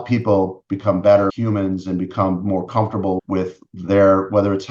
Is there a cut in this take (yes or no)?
yes